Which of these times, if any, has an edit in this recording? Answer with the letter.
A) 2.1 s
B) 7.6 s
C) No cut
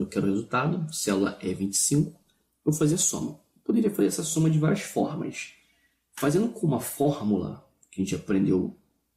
B